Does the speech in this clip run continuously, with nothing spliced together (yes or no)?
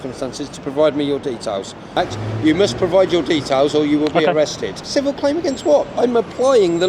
no